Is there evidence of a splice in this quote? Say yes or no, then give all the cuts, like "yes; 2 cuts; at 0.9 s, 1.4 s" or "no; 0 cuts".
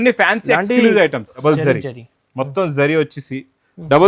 yes; 1 cut; at 1.4 s